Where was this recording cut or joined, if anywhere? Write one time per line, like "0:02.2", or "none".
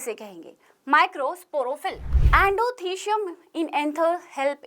0:02.1